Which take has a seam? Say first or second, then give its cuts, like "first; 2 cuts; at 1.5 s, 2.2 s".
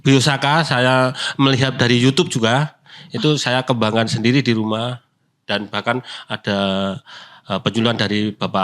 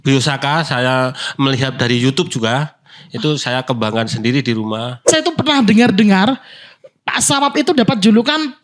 second; 1 cut; at 5.1 s